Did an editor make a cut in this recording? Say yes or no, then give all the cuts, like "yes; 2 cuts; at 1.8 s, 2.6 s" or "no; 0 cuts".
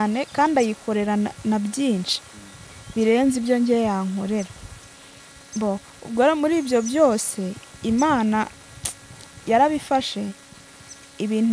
no; 0 cuts